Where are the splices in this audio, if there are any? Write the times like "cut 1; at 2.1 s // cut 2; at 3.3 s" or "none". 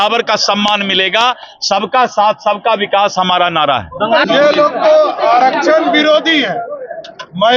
cut 1; at 4.3 s